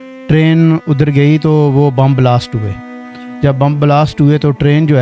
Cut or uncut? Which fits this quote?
uncut